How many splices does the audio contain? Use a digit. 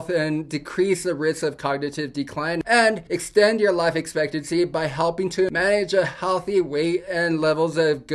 2